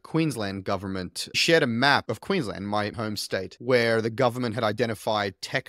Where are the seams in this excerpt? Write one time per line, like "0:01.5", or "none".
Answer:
0:01.4